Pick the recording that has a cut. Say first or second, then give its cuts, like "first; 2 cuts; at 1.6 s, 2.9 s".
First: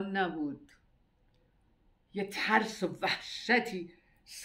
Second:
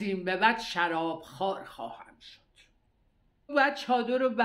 second; 1 cut; at 3.5 s